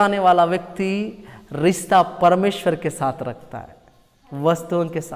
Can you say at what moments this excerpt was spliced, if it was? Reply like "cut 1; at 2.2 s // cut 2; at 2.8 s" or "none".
none